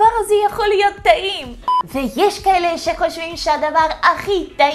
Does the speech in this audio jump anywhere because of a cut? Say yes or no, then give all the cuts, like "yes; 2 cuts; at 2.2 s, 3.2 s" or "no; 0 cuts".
yes; 1 cut; at 1.5 s